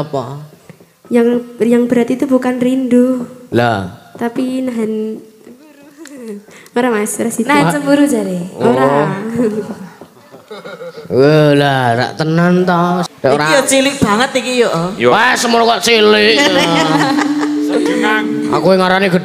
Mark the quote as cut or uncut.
cut